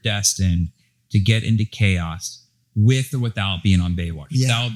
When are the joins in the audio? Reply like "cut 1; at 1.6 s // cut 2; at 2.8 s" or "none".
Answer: none